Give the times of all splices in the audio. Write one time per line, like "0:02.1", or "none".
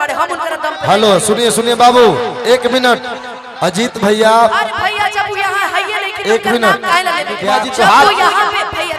0:07.6